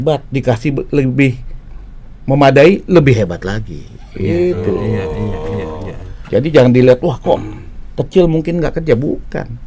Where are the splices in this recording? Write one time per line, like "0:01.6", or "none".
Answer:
none